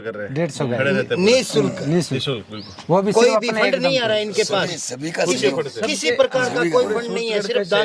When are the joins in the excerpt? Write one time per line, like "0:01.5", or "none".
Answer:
none